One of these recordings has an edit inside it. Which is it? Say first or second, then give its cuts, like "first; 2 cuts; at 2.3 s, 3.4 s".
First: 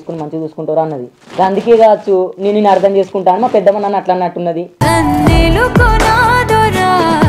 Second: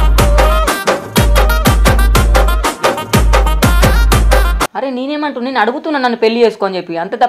second; 1 cut; at 4.6 s